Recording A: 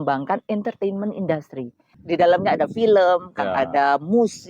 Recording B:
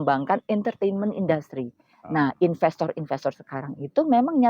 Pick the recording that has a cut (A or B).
A